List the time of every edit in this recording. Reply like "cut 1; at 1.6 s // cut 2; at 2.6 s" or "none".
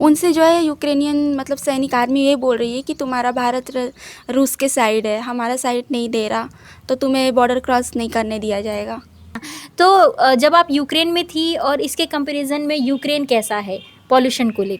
cut 1; at 9.4 s